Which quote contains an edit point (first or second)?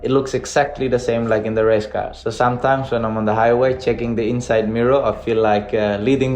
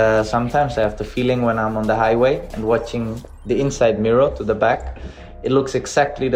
first